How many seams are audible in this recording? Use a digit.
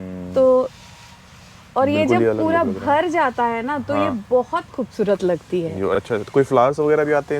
0